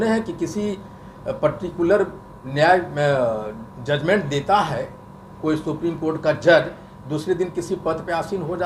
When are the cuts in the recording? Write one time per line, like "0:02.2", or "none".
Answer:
none